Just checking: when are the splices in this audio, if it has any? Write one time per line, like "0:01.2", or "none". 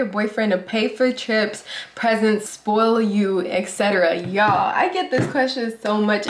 none